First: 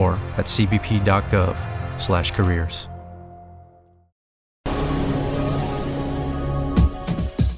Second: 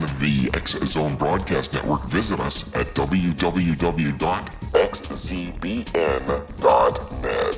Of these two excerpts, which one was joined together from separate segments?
first; 1 cut; at 4.1 s

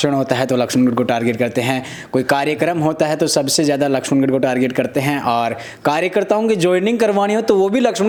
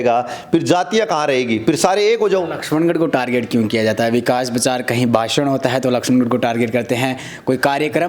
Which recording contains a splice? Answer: second; 1 cut; at 2.6 s

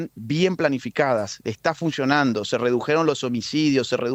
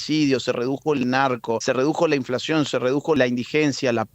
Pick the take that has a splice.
second; 2 cuts; at 1.6 s, 3.2 s

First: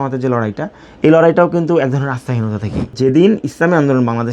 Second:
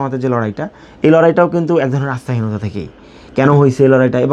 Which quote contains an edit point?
first; 1 cut; at 3.0 s

